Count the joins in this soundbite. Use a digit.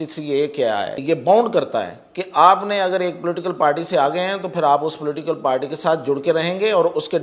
1